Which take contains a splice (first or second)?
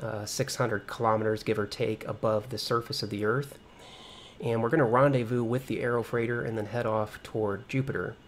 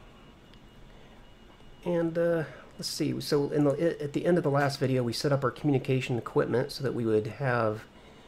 first